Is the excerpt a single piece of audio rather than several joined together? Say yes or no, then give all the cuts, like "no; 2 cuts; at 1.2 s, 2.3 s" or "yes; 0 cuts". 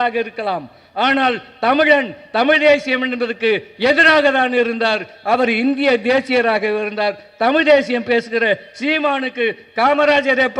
yes; 0 cuts